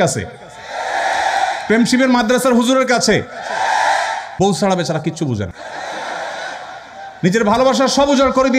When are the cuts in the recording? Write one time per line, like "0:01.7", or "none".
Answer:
0:04.2
0:05.6